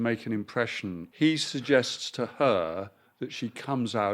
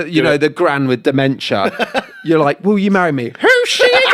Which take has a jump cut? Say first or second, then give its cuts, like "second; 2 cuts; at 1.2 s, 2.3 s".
first; 1 cut; at 1.0 s